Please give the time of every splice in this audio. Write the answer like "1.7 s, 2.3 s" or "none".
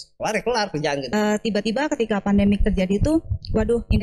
1.1 s